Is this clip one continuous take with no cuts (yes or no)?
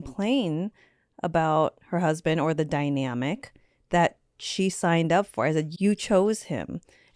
no